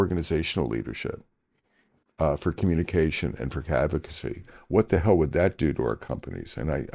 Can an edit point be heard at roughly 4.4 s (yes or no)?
no